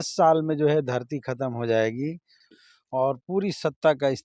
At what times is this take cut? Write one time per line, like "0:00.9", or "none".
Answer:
0:02.3